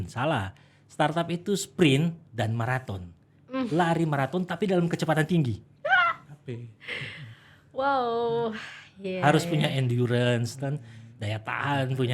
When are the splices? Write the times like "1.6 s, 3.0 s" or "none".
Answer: none

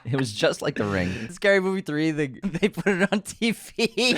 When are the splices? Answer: 1.2 s, 2.4 s

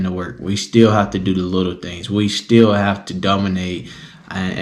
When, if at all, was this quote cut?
none

